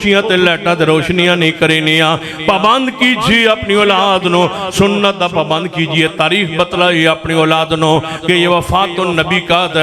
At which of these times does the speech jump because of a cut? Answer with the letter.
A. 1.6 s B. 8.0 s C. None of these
C